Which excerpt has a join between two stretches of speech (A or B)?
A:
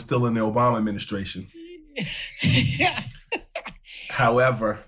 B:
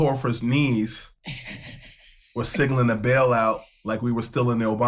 B